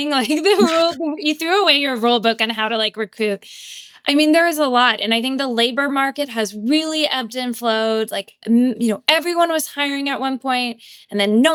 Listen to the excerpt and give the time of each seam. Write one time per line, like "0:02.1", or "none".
none